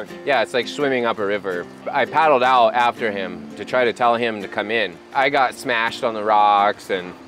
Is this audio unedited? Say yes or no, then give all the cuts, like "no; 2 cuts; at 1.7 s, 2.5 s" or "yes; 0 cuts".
no; 2 cuts; at 1.8 s, 5.1 s